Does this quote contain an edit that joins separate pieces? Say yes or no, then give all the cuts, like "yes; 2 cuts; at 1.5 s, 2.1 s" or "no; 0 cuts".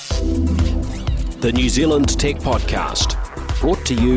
no; 0 cuts